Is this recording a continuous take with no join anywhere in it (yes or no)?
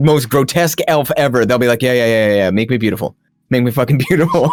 yes